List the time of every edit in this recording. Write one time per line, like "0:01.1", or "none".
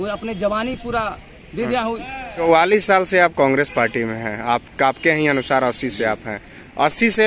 0:02.4